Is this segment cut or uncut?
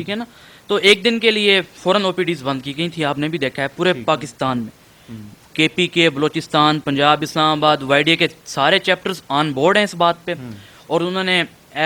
uncut